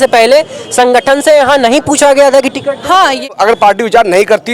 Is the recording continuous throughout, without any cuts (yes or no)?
no